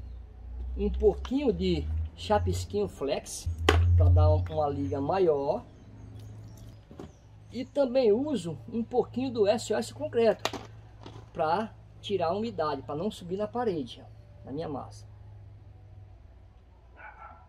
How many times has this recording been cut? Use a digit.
2